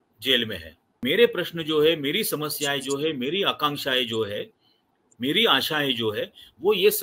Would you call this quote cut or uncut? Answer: cut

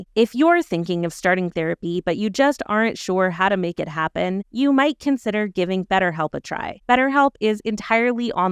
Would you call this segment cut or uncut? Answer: uncut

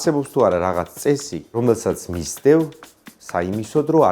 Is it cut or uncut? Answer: cut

